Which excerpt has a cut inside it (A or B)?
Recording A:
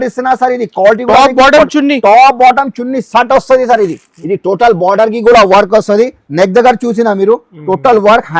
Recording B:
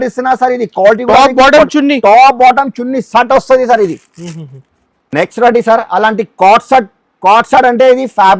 A